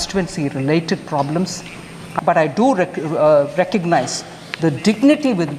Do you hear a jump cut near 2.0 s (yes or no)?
yes